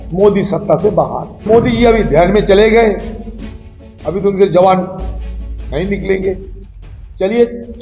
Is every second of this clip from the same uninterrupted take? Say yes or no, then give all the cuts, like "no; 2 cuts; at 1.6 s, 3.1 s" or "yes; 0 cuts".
no; 1 cut; at 1.4 s